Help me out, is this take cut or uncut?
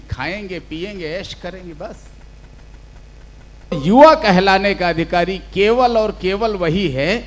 cut